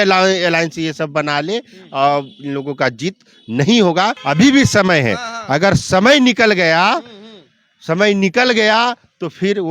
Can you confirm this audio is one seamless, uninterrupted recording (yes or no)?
no